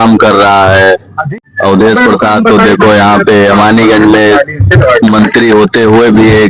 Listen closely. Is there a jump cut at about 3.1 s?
no; 1 cut; at 1.3 s

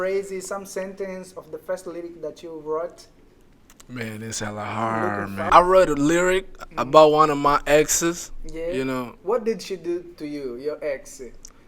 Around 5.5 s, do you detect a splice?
yes; 1 cut; at 5.5 s

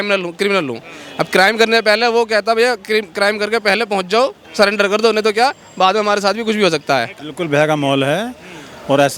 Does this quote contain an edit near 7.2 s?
yes; 1 cut; at 7.2 s

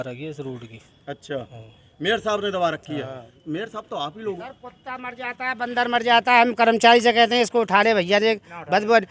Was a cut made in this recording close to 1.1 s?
no; 1 cut; at 4.4 s

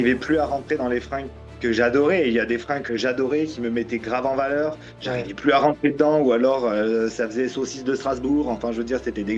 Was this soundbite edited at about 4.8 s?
no; 0 cuts

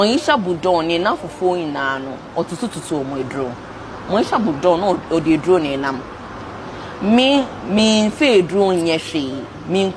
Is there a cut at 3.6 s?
no; 0 cuts

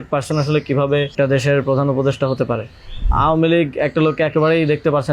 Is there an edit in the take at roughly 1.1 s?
yes; 2 cuts; at 1.1 s, 3.1 s

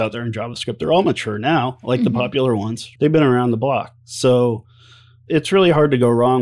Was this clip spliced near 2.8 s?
yes; 1 cut; at 2.8 s

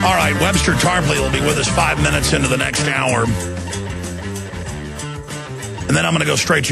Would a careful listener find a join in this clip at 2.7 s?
yes; 1 cut; at 2.7 s

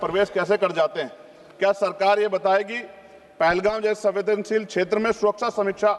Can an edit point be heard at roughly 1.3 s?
no; 0 cuts

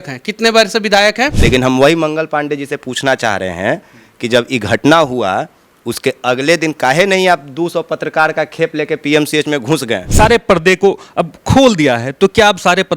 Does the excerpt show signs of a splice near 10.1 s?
yes; 2 cuts; at 1.4 s, 10.1 s

